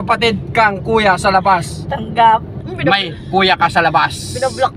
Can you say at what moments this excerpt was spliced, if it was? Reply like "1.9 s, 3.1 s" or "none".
2.6 s